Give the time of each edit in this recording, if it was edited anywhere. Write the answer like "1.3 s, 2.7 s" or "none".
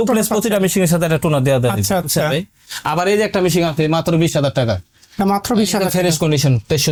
none